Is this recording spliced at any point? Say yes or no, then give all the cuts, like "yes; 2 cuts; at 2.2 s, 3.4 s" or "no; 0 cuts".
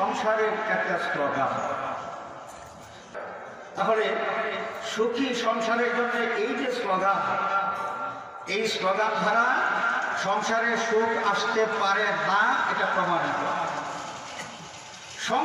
yes; 1 cut; at 3.1 s